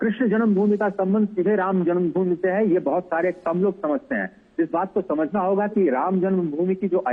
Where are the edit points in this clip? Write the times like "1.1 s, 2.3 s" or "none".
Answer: none